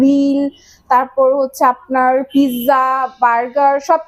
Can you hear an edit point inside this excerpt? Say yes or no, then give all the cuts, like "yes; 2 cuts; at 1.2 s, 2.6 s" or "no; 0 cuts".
no; 0 cuts